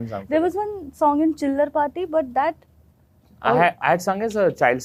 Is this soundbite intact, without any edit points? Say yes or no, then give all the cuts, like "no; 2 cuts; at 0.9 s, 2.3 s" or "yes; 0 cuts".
yes; 0 cuts